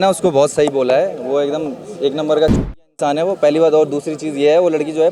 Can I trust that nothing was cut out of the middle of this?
yes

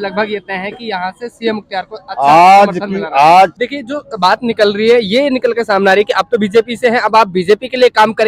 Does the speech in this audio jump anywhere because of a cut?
yes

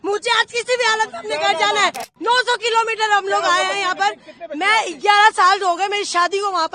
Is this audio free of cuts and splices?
no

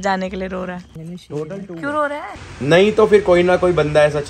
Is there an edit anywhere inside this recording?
yes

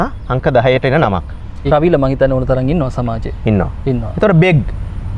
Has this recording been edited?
no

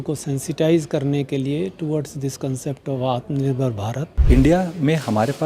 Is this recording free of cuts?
no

